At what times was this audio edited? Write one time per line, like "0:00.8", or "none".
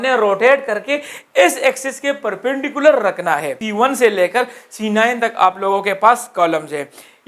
0:03.6